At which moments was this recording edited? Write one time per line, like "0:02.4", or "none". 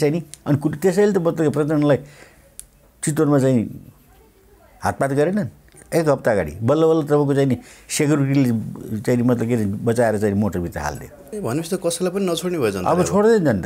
0:05.8
0:11.2